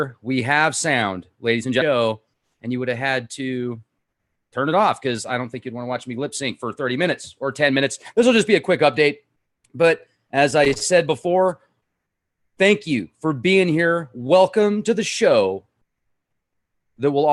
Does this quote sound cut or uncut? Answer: uncut